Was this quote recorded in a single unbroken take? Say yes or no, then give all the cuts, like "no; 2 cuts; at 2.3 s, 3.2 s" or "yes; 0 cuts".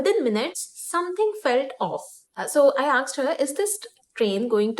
no; 1 cut; at 2.2 s